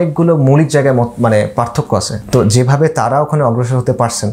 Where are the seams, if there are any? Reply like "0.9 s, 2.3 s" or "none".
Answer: 2.1 s